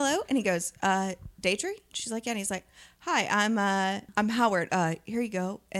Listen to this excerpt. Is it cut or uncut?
cut